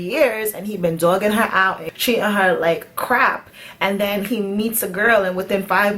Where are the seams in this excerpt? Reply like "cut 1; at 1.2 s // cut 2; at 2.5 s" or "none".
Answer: cut 1; at 1.9 s